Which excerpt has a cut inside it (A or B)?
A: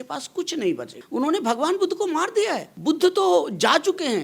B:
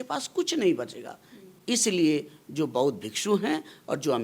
A